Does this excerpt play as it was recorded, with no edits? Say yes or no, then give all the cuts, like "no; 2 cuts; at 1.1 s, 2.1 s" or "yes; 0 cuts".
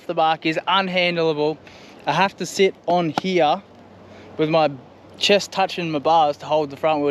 yes; 0 cuts